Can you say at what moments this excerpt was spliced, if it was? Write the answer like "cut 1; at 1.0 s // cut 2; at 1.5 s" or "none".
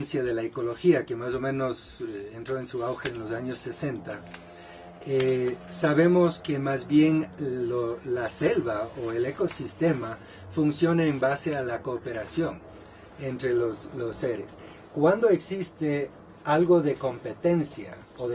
none